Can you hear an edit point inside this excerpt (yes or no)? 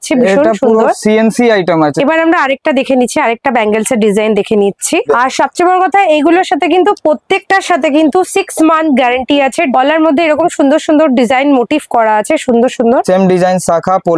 yes